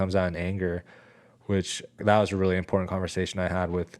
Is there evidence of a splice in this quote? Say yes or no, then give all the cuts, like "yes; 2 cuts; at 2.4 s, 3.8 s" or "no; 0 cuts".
yes; 1 cut; at 2.0 s